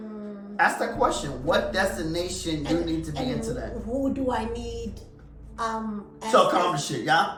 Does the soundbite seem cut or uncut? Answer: uncut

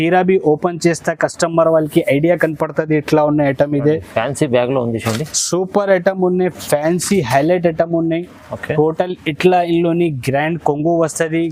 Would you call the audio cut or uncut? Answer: uncut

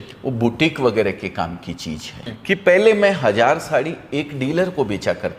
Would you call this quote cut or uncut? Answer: cut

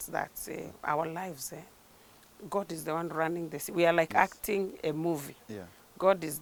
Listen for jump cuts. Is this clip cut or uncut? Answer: uncut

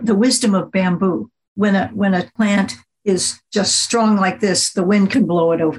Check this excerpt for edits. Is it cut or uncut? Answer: cut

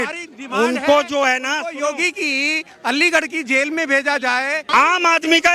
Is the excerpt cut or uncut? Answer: cut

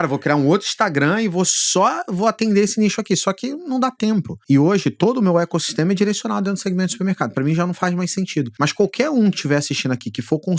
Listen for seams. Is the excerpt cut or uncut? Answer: cut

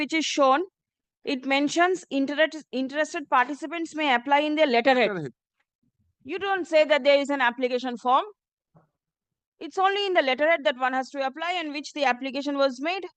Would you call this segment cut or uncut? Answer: uncut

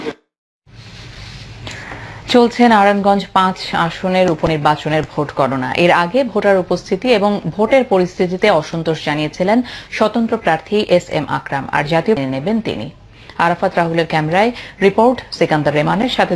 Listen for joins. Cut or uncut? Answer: uncut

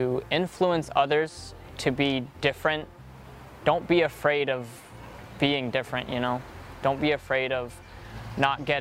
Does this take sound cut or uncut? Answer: uncut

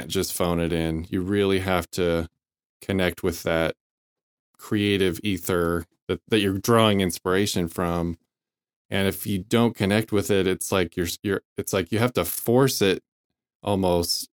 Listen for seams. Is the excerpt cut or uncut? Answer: cut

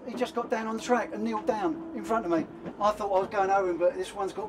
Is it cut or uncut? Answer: cut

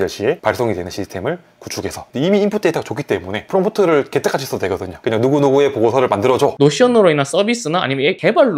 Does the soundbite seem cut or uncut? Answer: cut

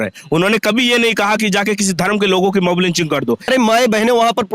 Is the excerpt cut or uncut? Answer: cut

